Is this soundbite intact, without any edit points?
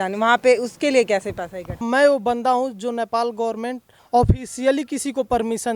no; 2 cuts; at 1.8 s, 3.9 s

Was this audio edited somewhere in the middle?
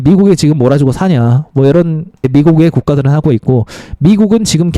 yes; 1 cut; at 2.2 s

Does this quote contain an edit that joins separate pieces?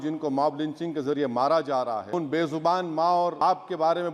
yes; 2 cuts; at 2.1 s, 3.4 s

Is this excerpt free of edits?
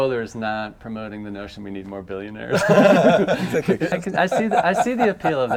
no; 1 cut; at 3.9 s

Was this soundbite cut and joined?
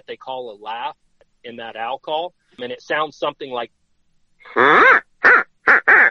yes; 3 cuts; at 1.2 s, 2.6 s, 3.7 s

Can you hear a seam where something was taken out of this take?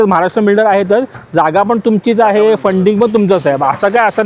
no; 0 cuts

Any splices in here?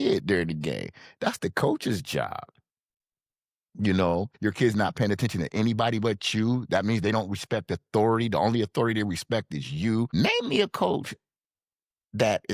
yes; 2 cuts; at 4.3 s, 10.1 s

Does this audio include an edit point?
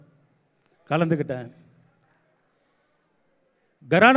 no; 0 cuts

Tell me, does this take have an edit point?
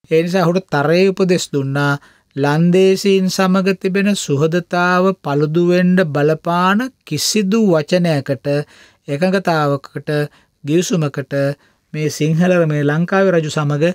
no; 0 cuts

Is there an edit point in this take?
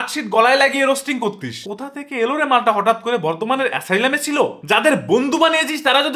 yes; 2 cuts; at 1.7 s, 4.5 s

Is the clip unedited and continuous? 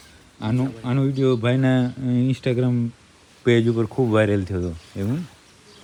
yes; 0 cuts

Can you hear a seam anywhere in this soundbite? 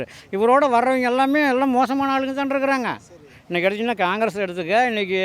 no; 0 cuts

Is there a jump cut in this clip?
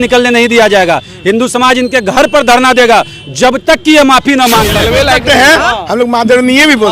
yes; 1 cut; at 4.8 s

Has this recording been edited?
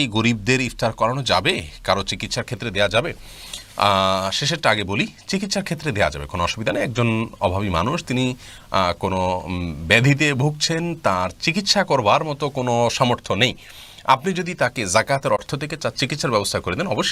no; 0 cuts

